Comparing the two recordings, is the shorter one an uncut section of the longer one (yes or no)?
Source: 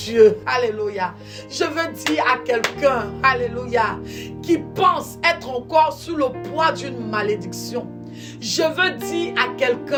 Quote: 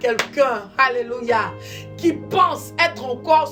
yes